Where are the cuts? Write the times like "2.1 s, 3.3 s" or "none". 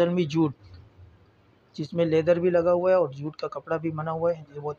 none